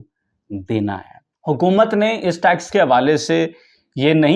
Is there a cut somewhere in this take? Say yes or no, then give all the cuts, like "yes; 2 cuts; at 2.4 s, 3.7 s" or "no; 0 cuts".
yes; 1 cut; at 1.4 s